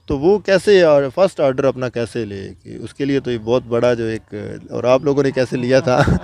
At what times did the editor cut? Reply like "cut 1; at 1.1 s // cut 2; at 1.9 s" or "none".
none